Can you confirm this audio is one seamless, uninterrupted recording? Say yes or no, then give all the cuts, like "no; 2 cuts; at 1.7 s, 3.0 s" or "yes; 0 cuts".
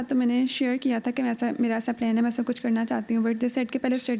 yes; 0 cuts